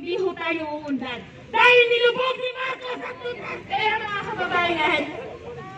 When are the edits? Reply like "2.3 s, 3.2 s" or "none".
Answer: 3.4 s